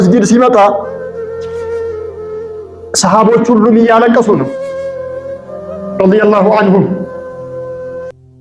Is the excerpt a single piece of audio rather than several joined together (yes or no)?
no